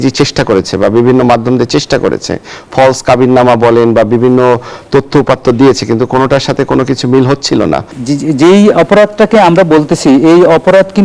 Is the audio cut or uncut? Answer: cut